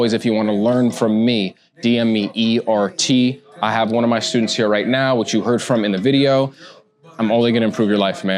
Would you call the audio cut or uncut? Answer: uncut